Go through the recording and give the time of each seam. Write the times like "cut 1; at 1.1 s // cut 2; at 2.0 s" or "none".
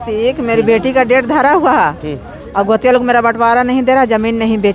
none